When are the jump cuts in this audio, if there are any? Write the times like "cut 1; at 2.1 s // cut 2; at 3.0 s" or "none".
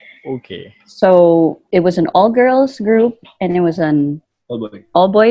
none